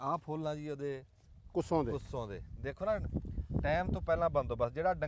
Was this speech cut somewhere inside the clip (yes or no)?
no